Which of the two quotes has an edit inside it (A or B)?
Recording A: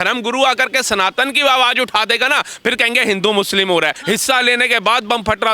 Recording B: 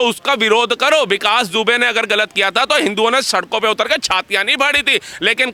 A